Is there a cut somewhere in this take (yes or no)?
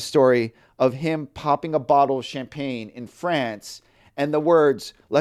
no